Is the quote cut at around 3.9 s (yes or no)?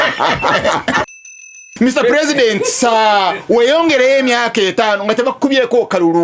no